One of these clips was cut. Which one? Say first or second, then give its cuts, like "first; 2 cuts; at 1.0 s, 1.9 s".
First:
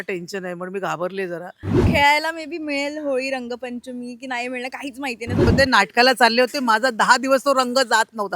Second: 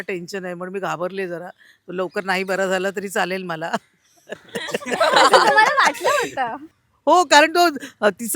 first; 2 cuts; at 1.7 s, 5.5 s